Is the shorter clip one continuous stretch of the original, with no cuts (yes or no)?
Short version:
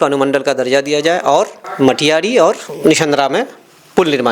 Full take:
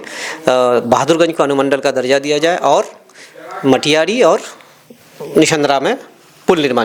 no